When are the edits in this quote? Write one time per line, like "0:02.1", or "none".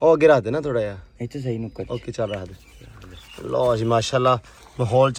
none